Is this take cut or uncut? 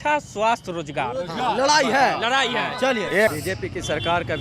cut